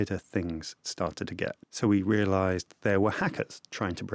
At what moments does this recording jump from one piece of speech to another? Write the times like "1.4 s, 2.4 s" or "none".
1.7 s